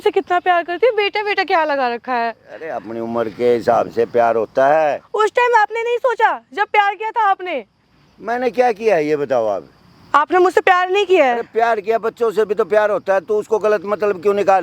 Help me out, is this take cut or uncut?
uncut